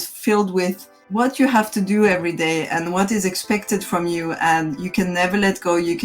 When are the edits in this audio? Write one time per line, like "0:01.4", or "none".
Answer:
0:00.9